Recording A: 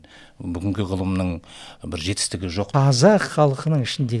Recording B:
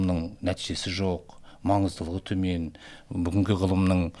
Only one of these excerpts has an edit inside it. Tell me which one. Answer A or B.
A